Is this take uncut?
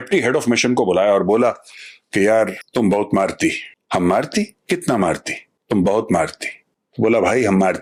yes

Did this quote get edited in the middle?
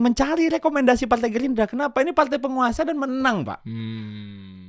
no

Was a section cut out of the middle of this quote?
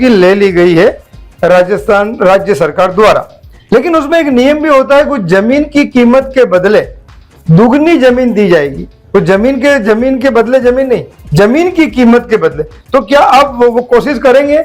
yes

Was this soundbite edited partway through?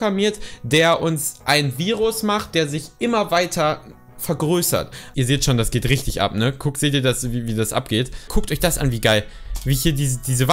yes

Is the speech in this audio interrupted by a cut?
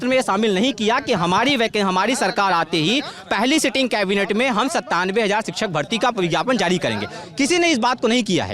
no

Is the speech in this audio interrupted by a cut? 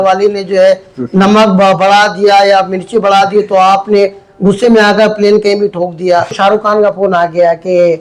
yes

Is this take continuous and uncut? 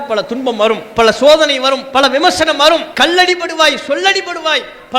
no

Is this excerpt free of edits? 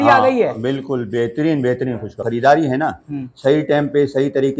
no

